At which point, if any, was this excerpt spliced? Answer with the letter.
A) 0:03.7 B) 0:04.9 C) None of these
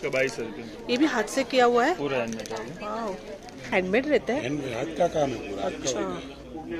A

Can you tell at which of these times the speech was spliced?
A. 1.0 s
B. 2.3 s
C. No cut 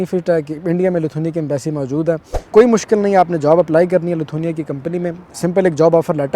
B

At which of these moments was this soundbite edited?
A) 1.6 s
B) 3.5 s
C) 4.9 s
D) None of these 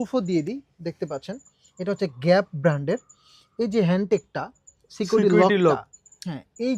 D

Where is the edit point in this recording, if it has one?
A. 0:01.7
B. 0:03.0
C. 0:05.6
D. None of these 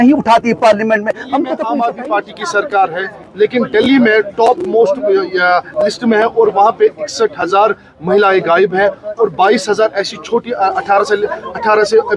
A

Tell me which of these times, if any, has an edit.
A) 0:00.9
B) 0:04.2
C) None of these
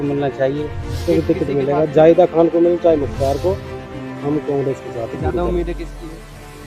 A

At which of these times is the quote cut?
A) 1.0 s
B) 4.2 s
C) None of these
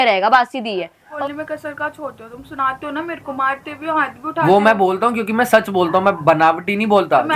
A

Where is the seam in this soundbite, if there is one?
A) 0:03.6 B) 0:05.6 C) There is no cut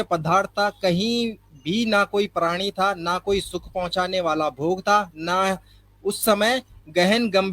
C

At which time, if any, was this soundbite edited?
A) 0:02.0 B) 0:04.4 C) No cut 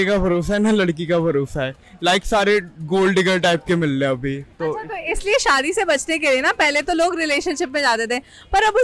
C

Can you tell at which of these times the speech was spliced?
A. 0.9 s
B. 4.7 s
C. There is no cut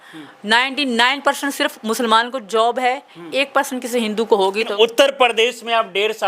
B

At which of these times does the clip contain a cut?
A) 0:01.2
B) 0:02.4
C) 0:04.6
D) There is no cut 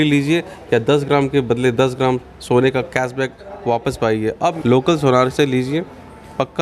C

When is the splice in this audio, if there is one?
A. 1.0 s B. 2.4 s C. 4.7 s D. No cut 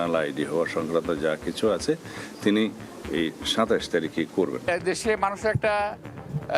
C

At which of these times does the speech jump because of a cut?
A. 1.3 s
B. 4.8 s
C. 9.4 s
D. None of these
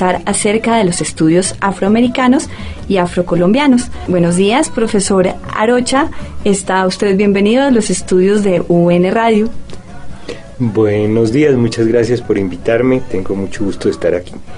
B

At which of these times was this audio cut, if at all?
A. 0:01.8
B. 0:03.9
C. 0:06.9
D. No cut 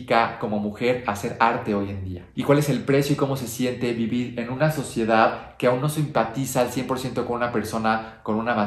D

